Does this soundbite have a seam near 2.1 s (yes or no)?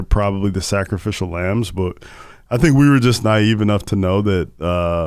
no